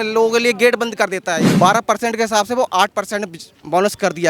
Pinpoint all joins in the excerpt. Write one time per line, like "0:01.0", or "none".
0:01.5